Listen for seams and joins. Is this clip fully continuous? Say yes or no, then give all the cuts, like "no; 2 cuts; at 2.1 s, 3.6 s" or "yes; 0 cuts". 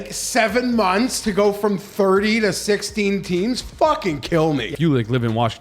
no; 1 cut; at 4.7 s